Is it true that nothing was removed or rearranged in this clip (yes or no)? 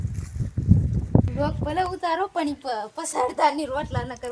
no